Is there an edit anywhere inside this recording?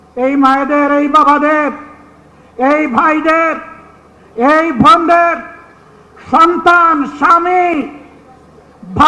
no; 0 cuts

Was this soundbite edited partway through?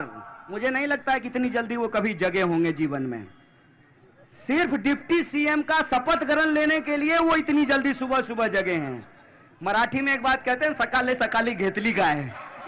no; 0 cuts

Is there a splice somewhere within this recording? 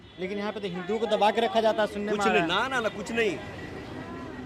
no; 0 cuts

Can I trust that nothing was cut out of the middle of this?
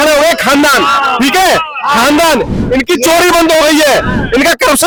yes; 0 cuts

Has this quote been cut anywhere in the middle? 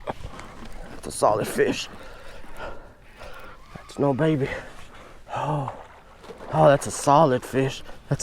no; 0 cuts

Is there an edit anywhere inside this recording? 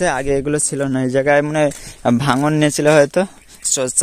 no; 0 cuts

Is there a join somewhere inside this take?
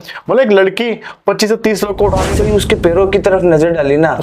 yes; 1 cut; at 2.3 s

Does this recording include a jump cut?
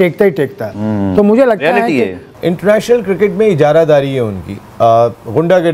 yes; 1 cut; at 2.3 s

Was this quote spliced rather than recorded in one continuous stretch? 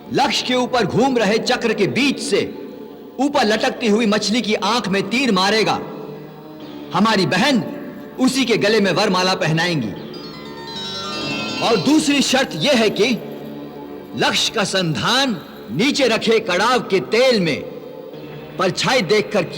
yes; 2 cuts; at 11.5 s, 15.5 s

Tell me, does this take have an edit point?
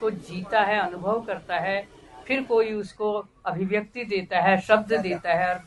no; 0 cuts

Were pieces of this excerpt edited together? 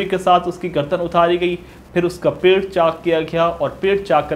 no; 0 cuts

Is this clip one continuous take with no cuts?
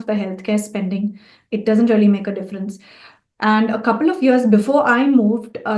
yes; 0 cuts

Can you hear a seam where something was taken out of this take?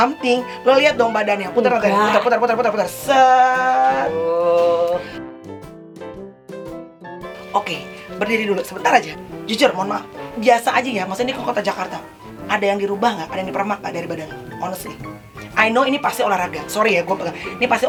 no; 0 cuts

